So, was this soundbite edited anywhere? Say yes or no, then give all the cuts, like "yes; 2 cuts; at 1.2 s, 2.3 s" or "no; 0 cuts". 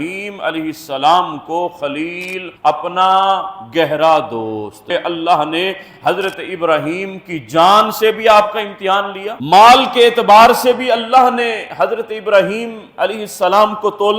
yes; 2 cuts; at 4.9 s, 9.3 s